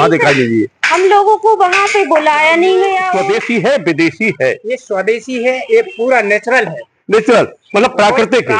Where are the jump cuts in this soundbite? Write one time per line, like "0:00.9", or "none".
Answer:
0:03.0